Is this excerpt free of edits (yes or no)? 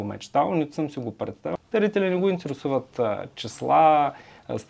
no